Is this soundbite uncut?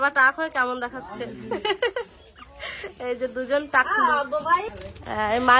no; 1 cut; at 4.6 s

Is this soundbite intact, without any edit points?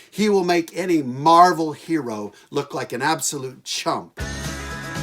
no; 1 cut; at 4.1 s

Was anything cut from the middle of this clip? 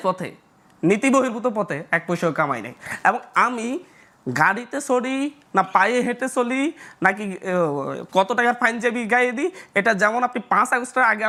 no; 0 cuts

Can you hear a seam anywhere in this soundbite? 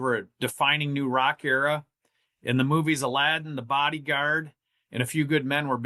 no; 0 cuts

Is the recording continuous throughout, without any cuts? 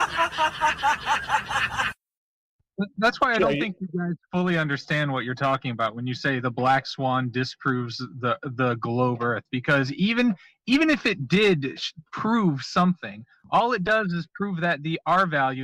no; 1 cut; at 1.9 s

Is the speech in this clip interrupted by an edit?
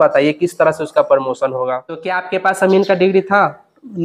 yes; 1 cut; at 2.2 s

